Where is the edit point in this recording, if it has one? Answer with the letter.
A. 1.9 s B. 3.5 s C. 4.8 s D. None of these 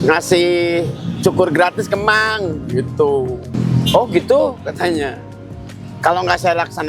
B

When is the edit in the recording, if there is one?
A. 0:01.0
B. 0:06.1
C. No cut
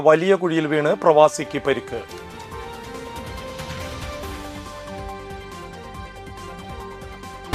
C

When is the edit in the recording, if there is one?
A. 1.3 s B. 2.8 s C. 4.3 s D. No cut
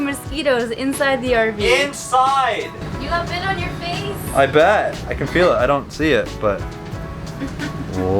B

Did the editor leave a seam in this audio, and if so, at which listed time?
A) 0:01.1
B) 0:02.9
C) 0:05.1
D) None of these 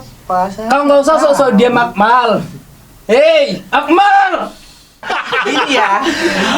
C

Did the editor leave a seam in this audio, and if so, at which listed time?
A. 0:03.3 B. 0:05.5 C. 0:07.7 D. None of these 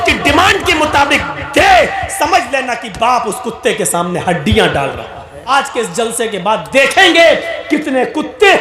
B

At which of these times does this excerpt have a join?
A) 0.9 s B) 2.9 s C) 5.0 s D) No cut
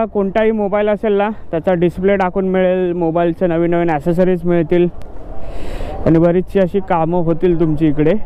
D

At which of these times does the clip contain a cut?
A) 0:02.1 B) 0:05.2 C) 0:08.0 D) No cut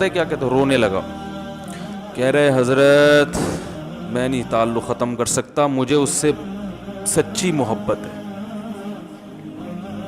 C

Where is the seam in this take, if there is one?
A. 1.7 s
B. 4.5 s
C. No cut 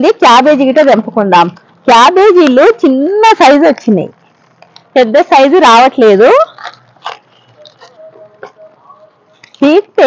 C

